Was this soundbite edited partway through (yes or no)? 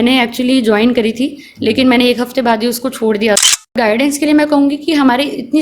yes